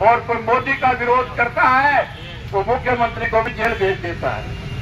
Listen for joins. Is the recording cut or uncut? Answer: uncut